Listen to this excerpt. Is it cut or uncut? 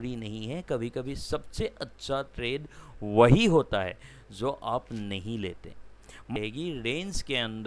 cut